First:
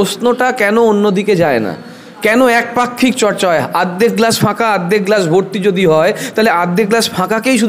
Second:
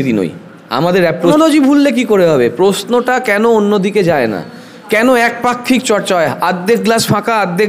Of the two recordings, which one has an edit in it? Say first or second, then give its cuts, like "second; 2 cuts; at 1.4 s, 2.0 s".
second; 1 cut; at 1.3 s